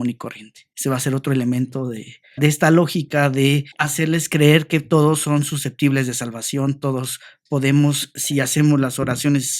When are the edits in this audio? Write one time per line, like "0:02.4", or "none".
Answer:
0:02.4
0:03.8